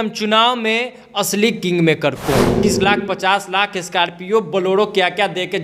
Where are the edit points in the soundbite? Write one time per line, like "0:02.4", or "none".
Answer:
0:02.6